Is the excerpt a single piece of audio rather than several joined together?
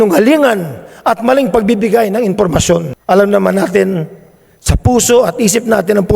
no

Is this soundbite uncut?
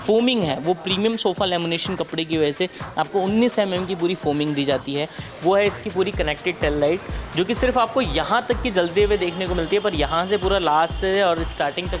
no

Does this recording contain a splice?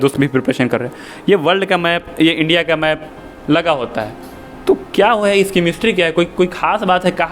no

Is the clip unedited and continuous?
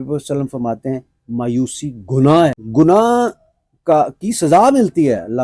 no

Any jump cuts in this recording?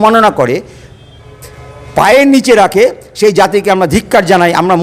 no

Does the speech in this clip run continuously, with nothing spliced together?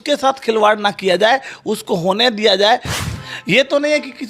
no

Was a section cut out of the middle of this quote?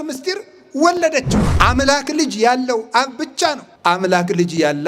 yes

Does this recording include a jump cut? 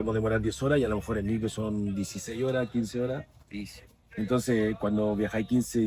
no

